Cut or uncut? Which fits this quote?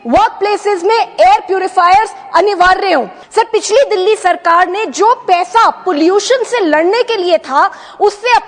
cut